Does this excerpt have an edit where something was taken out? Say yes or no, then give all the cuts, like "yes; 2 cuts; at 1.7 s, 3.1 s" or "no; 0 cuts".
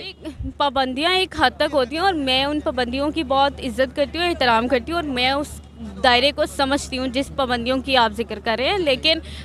no; 0 cuts